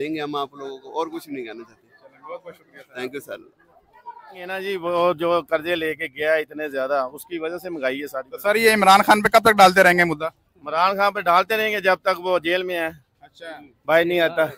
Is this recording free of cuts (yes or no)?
no